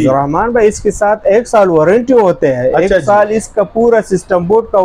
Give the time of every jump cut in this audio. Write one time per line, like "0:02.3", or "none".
none